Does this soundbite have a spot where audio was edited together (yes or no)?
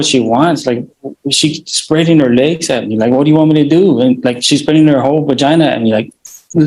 no